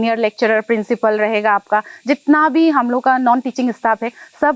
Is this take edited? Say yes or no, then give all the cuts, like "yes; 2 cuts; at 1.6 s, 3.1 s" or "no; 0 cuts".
no; 0 cuts